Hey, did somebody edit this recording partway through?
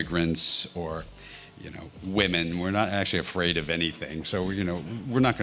no; 0 cuts

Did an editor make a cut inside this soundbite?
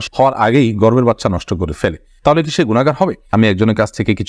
yes; 1 cut; at 3.3 s

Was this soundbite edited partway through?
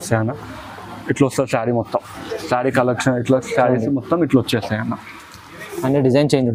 no; 0 cuts

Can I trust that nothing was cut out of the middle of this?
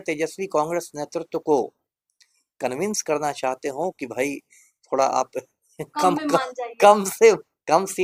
yes; 0 cuts

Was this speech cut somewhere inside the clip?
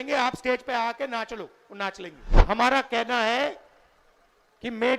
yes; 1 cut; at 2.3 s

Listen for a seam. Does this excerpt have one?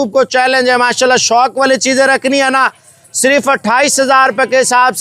no; 0 cuts

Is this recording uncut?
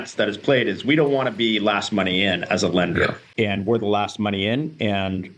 no; 1 cut; at 3.2 s

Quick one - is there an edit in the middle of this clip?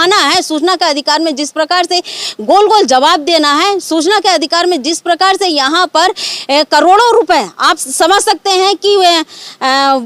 no; 0 cuts

